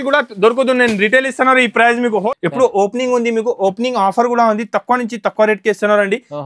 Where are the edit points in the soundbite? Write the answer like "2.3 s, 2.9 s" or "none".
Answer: 2.2 s